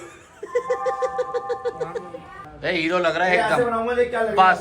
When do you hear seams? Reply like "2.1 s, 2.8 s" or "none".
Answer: 2.4 s